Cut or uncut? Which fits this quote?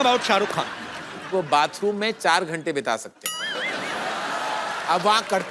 cut